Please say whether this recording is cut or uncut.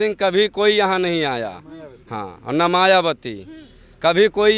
uncut